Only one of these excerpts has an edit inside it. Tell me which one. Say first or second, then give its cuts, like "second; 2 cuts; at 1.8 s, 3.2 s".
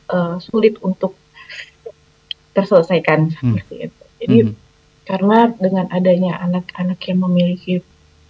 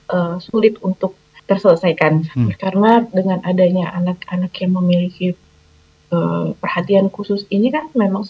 second; 2 cuts; at 1.3 s, 2.6 s